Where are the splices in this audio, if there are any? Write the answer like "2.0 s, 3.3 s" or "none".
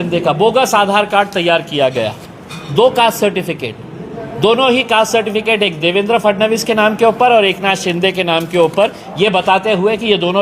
2.5 s